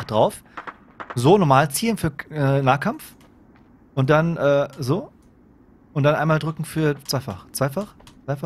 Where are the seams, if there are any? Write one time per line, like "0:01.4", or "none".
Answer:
none